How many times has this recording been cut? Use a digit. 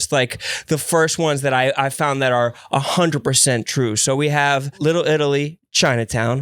1